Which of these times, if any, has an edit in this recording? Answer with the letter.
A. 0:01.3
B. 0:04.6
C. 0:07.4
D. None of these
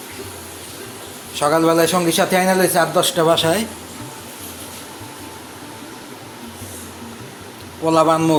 D